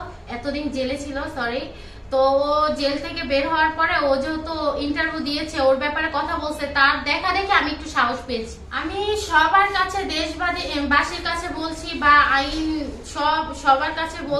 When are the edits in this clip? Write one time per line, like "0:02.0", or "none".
0:08.4